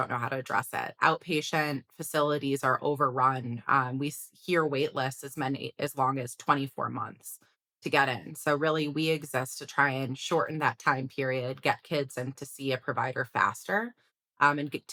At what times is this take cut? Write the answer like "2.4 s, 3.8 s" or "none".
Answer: none